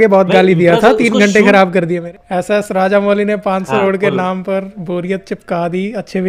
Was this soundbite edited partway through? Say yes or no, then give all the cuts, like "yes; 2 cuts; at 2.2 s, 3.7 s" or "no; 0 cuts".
yes; 2 cuts; at 2.0 s, 3.8 s